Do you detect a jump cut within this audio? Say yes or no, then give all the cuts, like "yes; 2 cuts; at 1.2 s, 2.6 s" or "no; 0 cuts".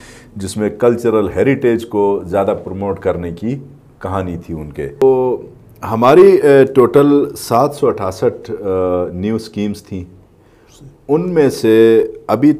yes; 1 cut; at 5.0 s